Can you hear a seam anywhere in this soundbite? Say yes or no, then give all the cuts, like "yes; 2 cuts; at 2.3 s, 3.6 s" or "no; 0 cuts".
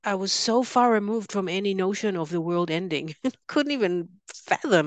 no; 0 cuts